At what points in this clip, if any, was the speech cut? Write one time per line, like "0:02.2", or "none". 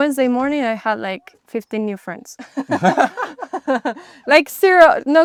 none